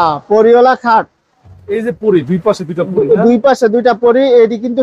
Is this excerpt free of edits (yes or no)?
yes